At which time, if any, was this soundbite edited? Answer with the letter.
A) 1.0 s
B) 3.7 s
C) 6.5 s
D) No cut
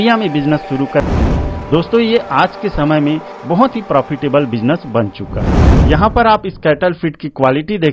A